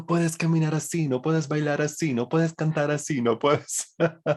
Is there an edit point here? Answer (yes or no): no